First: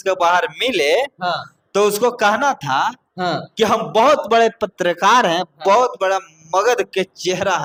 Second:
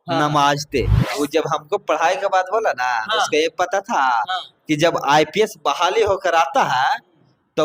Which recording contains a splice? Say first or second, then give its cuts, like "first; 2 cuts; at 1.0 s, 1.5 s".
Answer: second; 1 cut; at 1.0 s